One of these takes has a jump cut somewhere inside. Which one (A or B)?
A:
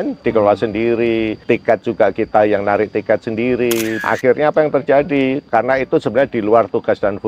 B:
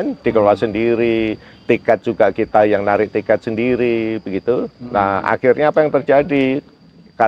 A